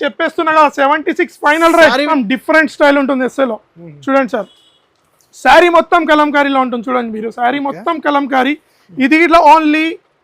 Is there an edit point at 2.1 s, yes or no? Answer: yes